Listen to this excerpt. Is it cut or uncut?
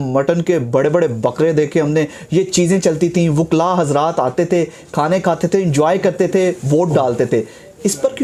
uncut